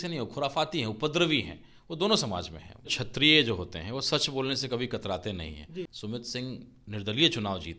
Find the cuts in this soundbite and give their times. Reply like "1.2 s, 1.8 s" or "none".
2.9 s, 6.0 s